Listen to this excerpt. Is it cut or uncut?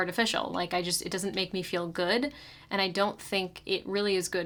uncut